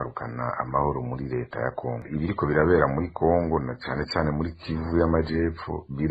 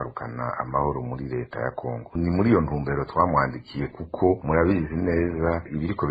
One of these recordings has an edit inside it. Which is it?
first; 1 cut; at 2.1 s

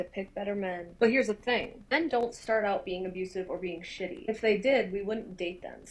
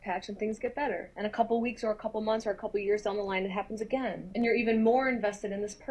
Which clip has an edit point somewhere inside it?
first; 1 cut; at 4.9 s

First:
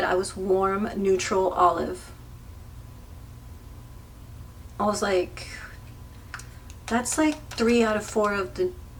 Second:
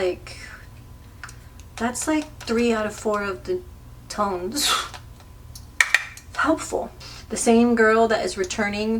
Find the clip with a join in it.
second; 1 cut; at 7.0 s

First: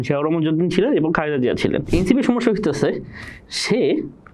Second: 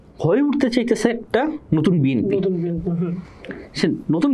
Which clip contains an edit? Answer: first; 1 cut; at 1.8 s

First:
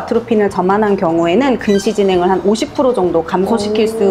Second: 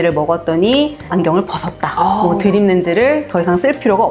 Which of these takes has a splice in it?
second; 1 cut; at 1.1 s

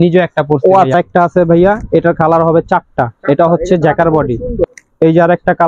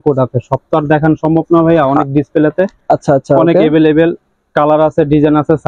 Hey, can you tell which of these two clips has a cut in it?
first; 2 cuts; at 0.9 s, 4.7 s

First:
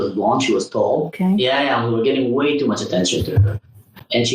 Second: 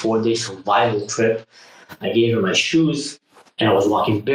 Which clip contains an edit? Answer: first; 1 cut; at 1.1 s

